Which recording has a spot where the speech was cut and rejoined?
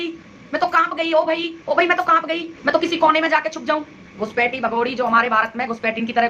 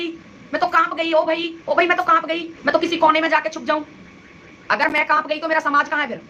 first; 1 cut; at 4.1 s

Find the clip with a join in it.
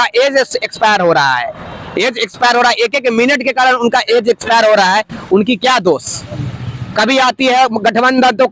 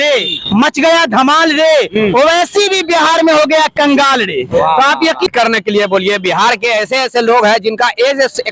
second; 1 cut; at 5.3 s

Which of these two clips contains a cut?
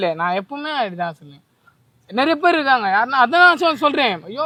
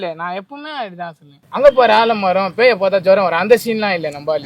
second; 1 cut; at 1.4 s

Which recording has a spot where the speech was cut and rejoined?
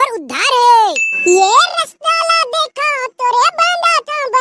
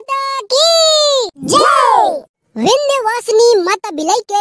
first; 1 cut; at 1.1 s

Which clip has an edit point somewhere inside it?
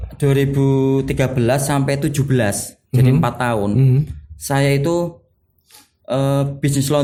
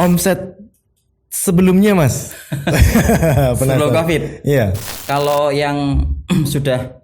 second; 1 cut; at 5.0 s

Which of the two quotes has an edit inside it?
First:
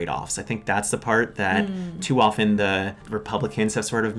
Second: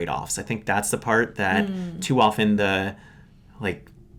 first; 1 cut; at 3.0 s

